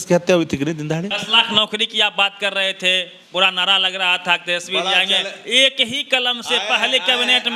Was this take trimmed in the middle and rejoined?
yes; 1 cut; at 1.2 s

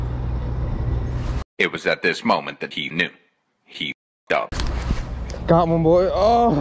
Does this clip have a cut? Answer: no; 0 cuts

